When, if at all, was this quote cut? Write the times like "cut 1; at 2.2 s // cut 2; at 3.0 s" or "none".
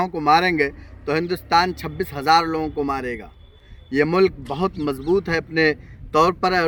none